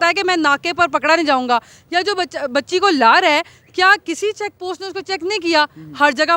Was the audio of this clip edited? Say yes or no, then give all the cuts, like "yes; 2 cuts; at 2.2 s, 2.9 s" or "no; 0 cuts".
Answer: no; 0 cuts